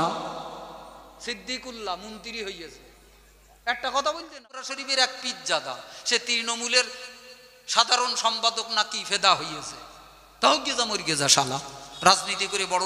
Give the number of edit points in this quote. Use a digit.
1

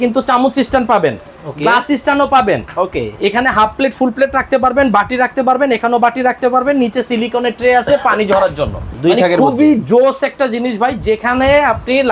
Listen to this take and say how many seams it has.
1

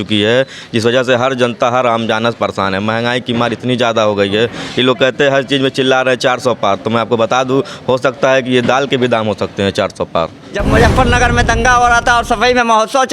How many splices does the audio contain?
1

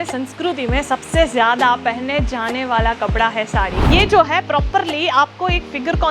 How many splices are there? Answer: 1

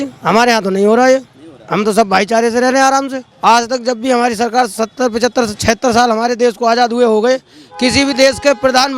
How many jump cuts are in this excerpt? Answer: 1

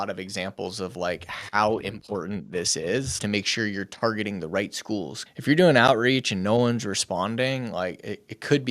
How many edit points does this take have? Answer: 2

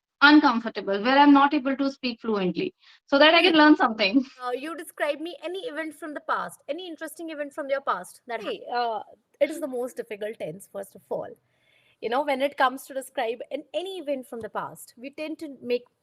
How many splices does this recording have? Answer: 2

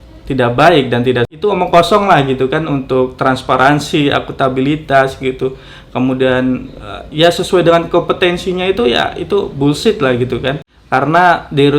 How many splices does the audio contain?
2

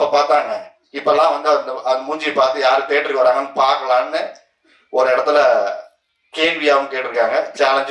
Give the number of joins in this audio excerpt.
0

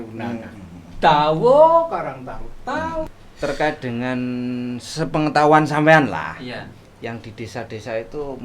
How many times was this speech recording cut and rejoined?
1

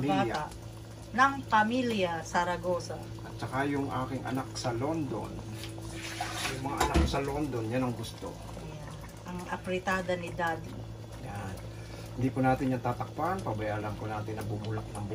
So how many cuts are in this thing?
0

